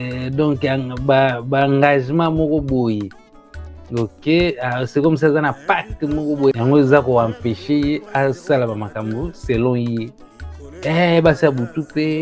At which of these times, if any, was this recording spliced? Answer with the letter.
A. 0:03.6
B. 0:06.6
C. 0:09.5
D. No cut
B